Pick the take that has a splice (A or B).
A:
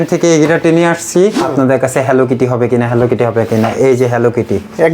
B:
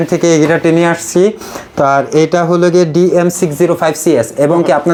A